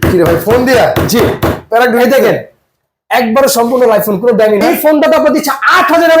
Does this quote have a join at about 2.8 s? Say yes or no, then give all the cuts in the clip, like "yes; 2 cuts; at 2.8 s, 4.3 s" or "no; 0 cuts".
no; 1 cut; at 4.6 s